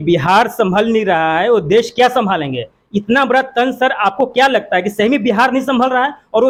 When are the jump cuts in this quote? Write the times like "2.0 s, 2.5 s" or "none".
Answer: none